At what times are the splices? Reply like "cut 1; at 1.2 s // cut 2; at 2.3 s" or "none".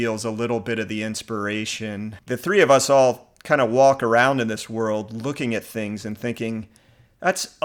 cut 1; at 2.2 s